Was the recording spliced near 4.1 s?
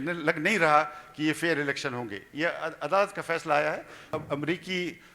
yes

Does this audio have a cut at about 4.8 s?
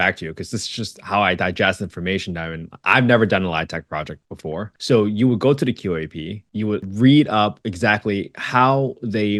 no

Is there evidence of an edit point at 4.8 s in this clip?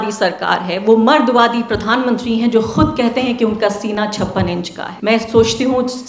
yes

